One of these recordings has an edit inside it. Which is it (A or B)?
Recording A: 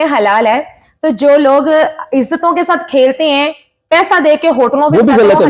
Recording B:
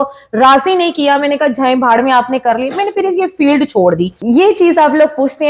B